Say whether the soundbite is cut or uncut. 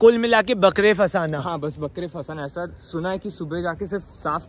uncut